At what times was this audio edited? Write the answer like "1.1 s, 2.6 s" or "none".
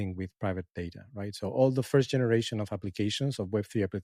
none